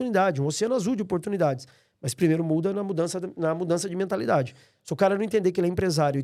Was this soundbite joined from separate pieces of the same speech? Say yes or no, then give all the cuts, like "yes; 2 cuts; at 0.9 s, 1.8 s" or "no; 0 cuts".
no; 0 cuts